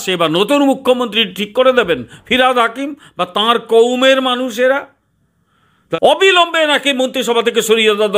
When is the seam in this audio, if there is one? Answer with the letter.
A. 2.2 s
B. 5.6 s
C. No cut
B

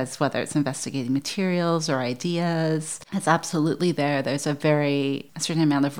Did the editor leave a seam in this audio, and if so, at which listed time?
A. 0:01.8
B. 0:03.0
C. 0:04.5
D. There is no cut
D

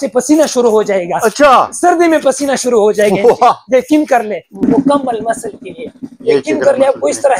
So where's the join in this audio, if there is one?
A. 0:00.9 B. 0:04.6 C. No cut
B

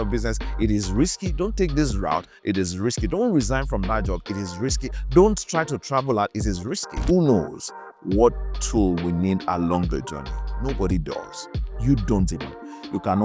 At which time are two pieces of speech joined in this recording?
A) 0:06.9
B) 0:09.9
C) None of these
A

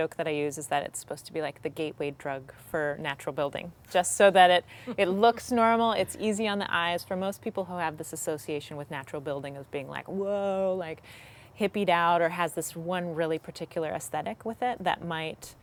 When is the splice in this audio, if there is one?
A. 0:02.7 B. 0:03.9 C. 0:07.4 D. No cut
D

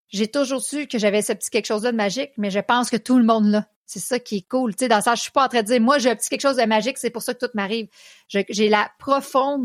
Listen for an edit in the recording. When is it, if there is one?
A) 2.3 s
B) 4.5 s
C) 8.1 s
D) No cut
D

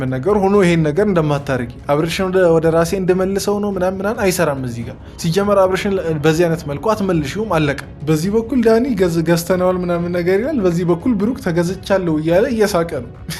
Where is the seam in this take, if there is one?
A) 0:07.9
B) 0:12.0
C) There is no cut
A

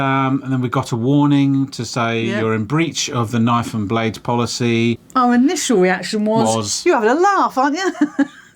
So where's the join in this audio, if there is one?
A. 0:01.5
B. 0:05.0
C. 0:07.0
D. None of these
B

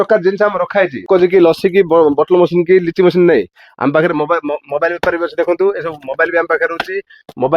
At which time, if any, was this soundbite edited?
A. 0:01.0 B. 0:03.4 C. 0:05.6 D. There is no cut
A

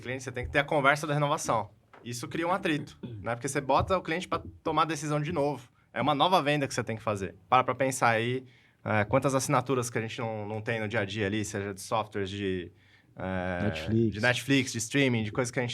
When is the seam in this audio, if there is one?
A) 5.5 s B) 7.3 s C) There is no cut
B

